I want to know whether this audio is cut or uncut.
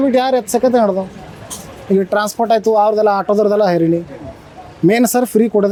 uncut